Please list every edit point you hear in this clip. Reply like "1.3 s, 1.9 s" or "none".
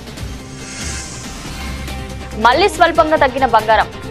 0.9 s, 2.1 s